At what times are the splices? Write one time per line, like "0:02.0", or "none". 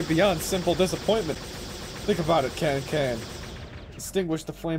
none